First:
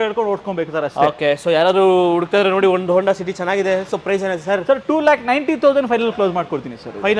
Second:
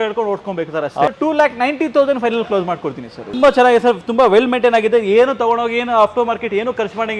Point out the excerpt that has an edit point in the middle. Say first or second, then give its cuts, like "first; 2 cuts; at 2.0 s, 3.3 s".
second; 2 cuts; at 1.1 s, 3.3 s